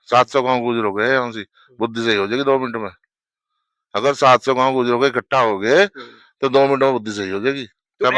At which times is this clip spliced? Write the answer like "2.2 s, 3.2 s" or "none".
none